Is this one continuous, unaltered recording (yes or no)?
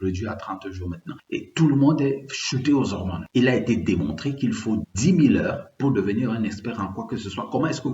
no